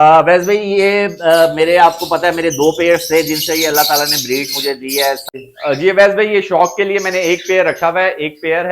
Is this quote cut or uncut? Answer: cut